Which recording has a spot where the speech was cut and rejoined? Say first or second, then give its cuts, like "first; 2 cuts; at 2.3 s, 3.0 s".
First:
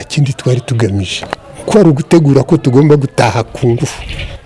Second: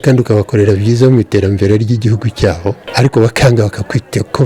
second; 1 cut; at 2.8 s